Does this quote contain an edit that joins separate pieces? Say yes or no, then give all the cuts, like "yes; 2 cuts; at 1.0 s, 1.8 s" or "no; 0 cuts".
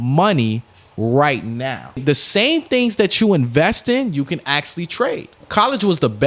yes; 2 cuts; at 2.0 s, 5.3 s